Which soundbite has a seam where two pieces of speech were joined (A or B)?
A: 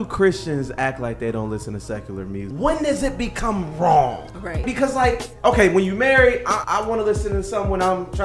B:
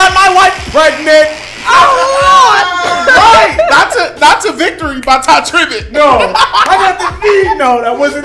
A